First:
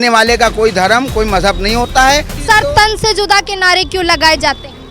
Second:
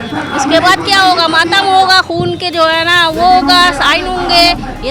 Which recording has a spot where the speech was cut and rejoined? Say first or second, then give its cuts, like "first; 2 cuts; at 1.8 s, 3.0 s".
first; 1 cut; at 2.4 s